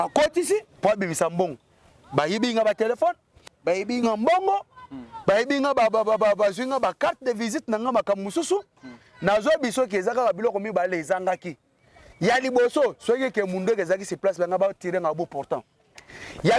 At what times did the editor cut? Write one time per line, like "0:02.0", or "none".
none